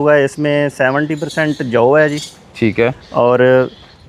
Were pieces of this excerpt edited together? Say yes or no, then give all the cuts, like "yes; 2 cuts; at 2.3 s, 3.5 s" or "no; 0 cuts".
no; 0 cuts